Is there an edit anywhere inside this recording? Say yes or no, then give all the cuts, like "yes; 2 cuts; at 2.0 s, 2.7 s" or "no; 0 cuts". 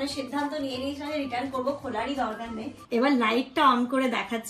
yes; 1 cut; at 2.8 s